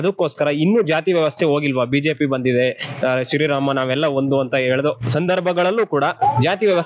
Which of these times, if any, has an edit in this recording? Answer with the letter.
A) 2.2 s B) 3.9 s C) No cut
C